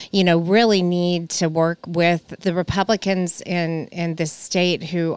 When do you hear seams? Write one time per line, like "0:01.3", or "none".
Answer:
0:02.3